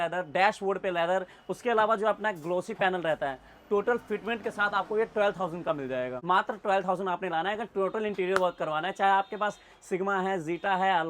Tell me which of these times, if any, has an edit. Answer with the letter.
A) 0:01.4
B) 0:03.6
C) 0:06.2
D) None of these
C